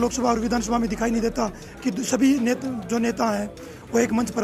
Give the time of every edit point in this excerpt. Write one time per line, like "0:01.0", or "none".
none